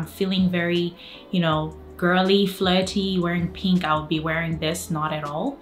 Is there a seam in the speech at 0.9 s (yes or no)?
no